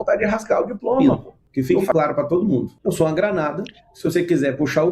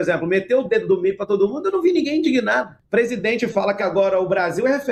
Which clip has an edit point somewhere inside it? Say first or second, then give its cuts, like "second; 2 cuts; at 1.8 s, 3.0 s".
first; 2 cuts; at 1.4 s, 2.7 s